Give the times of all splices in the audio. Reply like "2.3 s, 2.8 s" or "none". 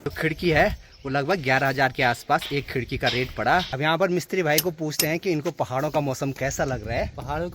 3.7 s